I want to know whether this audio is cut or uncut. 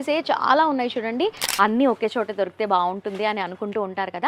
cut